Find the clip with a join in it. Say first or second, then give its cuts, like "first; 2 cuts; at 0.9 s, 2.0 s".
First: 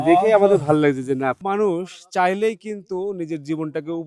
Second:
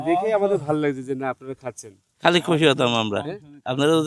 first; 1 cut; at 1.4 s